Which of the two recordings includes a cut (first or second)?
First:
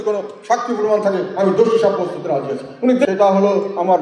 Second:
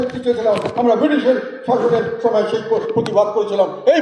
first